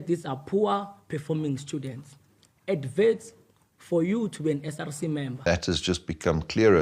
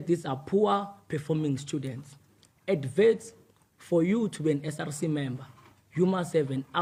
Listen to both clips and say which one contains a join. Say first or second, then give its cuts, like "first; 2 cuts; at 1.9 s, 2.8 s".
first; 1 cut; at 5.5 s